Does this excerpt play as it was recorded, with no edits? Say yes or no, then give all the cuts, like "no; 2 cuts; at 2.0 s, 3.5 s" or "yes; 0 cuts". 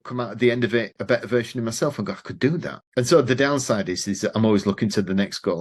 no; 2 cuts; at 0.9 s, 2.8 s